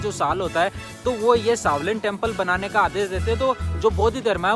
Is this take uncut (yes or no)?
yes